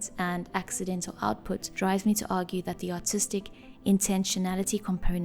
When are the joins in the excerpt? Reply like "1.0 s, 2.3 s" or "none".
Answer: none